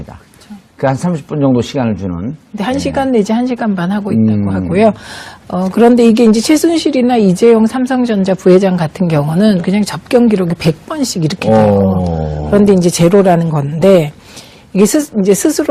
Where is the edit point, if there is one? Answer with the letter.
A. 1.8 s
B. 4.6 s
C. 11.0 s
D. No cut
B